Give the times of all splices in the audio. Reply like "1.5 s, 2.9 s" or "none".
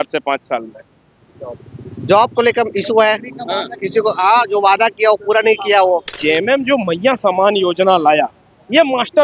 6.1 s